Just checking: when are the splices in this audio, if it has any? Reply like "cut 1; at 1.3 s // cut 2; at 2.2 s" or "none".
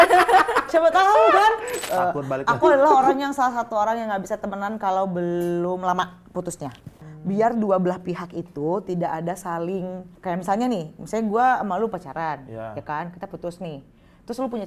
cut 1; at 1.7 s // cut 2; at 7.1 s // cut 3; at 10.1 s